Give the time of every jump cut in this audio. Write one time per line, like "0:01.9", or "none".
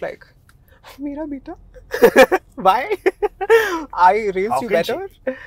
none